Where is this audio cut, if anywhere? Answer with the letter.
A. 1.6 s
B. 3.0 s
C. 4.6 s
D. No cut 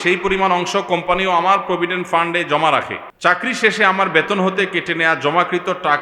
B